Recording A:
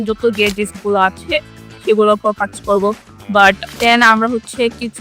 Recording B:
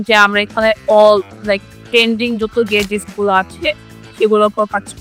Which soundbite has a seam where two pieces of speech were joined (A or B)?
A